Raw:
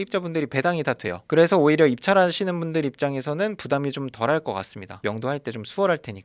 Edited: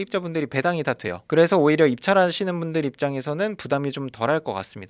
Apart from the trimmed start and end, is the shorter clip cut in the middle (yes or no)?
no